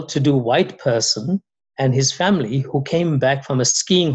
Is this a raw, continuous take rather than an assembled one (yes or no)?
yes